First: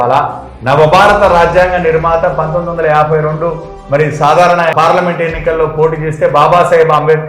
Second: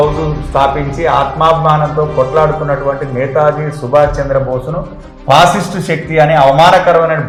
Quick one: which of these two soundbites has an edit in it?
first; 1 cut; at 4.7 s

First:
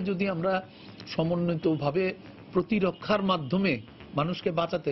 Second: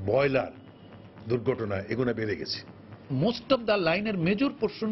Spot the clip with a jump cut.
second; 1 cut; at 2.9 s

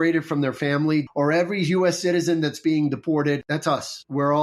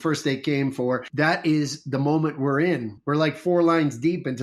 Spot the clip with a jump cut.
first; 2 cuts; at 1.1 s, 3.1 s

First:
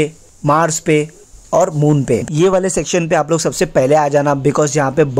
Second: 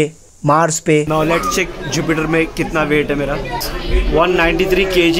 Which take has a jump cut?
second; 1 cut; at 1.1 s

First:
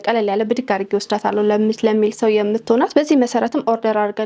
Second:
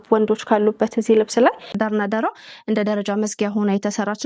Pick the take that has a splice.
second; 1 cut; at 1.7 s

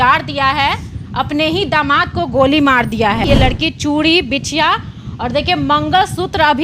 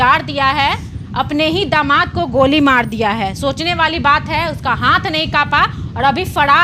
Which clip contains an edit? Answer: first; 1 cut; at 3.3 s

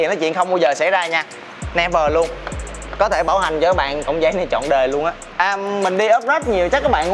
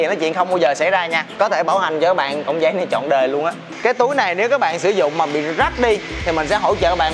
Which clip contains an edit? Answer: second; 2 cuts; at 1.2 s, 3.7 s

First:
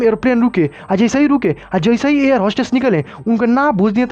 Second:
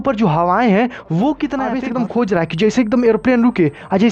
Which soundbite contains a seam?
second; 1 cut; at 1.8 s

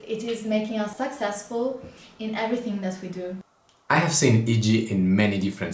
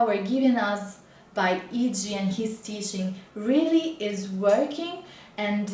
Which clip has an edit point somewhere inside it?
first; 2 cuts; at 0.9 s, 3.4 s

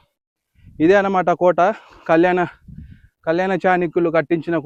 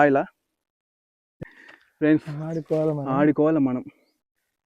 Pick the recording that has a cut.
second; 1 cut; at 1.3 s

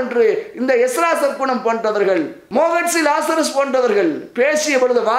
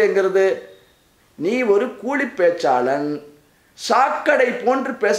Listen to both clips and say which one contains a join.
first; 1 cut; at 2.4 s

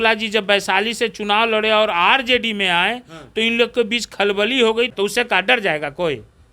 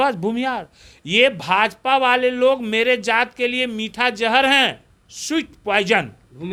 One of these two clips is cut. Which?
first; 1 cut; at 4.9 s

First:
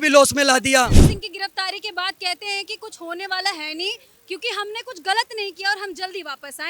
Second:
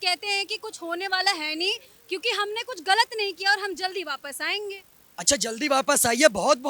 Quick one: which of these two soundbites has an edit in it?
first; 1 cut; at 1.0 s

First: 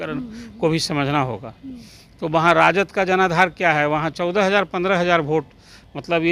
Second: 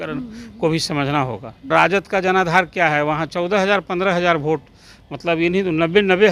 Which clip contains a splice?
second; 1 cut; at 1.7 s

